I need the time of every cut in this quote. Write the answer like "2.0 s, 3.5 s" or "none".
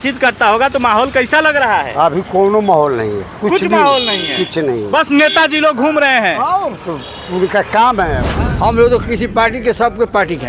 8.3 s

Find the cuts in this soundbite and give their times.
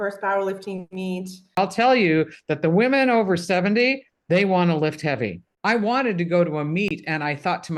1.6 s, 5.6 s

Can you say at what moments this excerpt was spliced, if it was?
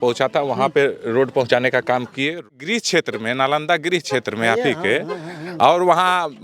2.5 s

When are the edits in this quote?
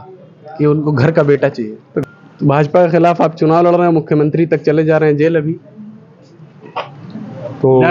2.0 s

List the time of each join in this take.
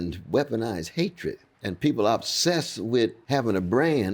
1.5 s, 3.2 s

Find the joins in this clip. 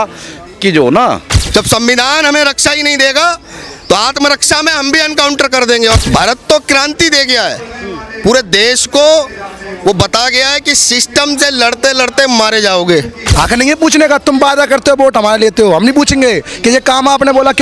1.3 s, 6.0 s, 13.2 s

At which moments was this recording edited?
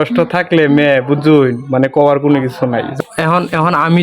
3.0 s

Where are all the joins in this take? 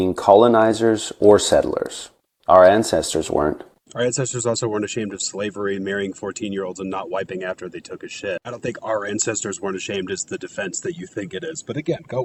none

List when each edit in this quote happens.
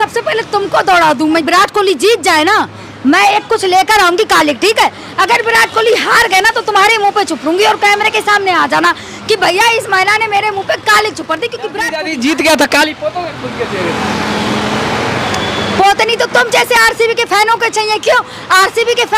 1.5 s, 11.9 s

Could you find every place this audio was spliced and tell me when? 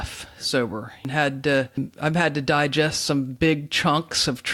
1.0 s, 1.8 s

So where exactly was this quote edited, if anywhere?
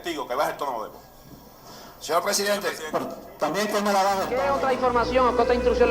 4.3 s

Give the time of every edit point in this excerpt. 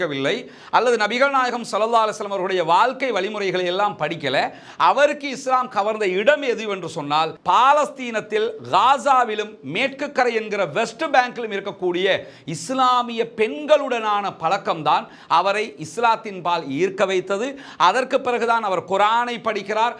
none

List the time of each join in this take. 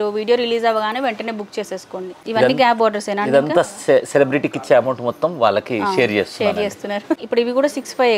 2.2 s, 7.2 s

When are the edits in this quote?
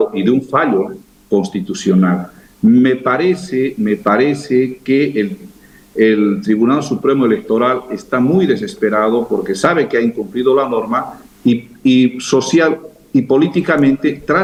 none

